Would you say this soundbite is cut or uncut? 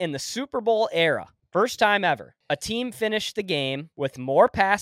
cut